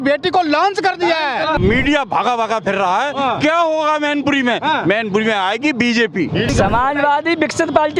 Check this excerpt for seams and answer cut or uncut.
cut